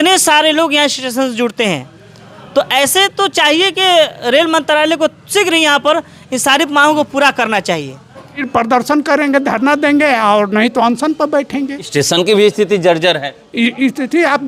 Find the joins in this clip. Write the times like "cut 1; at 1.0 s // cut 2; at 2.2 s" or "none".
cut 1; at 8.4 s